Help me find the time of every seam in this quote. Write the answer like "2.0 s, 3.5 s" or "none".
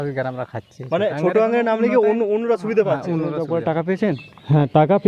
3.4 s